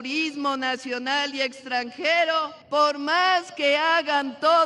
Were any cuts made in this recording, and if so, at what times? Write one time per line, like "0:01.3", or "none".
0:02.5